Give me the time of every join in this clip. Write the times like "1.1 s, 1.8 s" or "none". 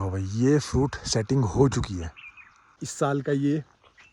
2.8 s